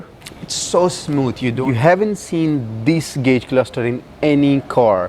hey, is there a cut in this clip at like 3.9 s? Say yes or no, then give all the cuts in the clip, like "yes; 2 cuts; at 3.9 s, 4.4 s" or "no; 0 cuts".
no; 1 cut; at 1.5 s